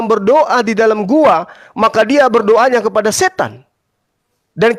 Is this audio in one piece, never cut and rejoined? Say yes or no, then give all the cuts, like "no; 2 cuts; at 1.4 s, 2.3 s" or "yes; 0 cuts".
yes; 0 cuts